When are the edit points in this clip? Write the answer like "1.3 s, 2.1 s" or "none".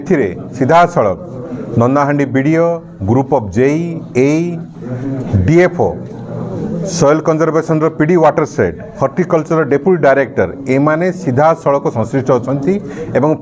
none